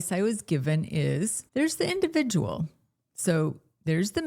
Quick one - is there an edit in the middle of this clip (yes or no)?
yes